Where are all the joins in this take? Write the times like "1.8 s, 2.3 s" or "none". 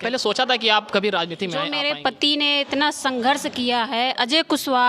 1.6 s